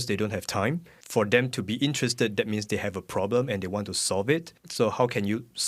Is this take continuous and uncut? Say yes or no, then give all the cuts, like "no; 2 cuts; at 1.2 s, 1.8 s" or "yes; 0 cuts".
no; 2 cuts; at 0.9 s, 4.6 s